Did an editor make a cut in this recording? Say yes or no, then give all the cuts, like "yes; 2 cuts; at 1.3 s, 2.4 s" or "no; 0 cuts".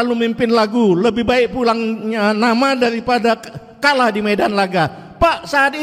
no; 0 cuts